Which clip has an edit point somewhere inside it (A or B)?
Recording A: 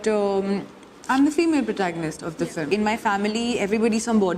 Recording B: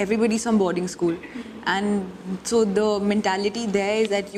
A